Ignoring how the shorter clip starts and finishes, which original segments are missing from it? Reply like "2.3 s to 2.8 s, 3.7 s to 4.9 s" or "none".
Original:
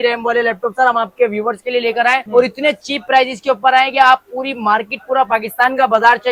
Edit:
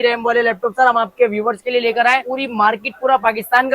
2.2 s to 4.3 s

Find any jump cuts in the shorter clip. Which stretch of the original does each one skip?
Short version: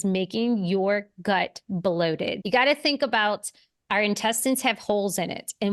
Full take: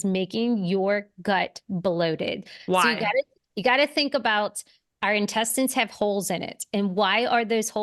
2.4 s to 3.5 s

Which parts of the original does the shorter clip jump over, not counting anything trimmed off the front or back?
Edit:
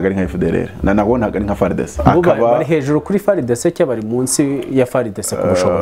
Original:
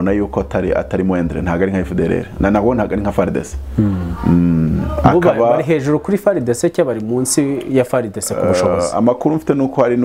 3.5 s to 4.9 s

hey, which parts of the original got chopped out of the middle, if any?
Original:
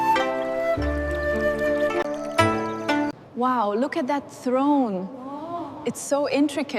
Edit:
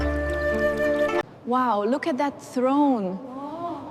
2.1 s to 3.2 s

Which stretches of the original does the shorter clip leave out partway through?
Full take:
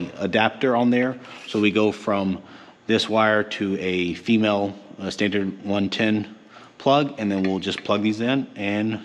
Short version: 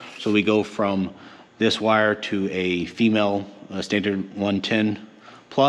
none

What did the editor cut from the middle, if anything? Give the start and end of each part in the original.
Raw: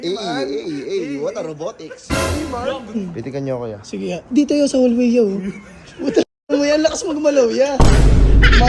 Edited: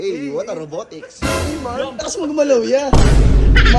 2.9 s to 6.9 s

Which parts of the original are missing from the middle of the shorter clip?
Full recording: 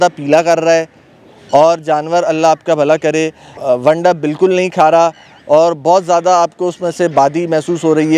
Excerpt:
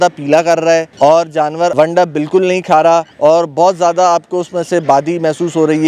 0.9 s to 1.4 s, 2.2 s to 3.8 s, 5.2 s to 5.4 s

